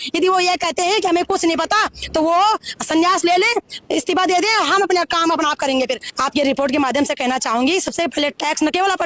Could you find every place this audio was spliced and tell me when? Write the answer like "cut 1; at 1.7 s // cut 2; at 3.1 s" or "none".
cut 1; at 6.0 s